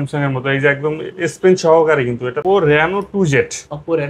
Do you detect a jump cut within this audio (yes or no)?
yes